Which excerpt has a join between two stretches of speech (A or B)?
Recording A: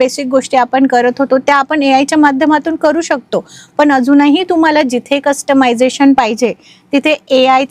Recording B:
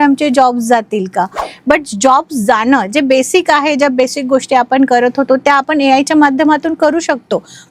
B